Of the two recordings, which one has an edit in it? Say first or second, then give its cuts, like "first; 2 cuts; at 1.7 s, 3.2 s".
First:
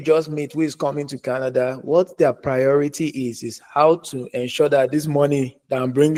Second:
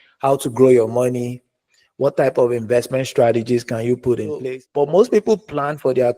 second; 1 cut; at 4.4 s